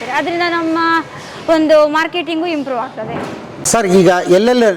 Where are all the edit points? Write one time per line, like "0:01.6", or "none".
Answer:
0:03.6